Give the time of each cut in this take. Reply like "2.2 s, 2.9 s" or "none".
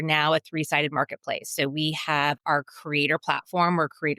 2.4 s